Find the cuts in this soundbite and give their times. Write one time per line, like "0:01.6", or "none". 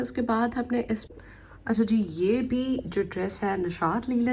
0:01.0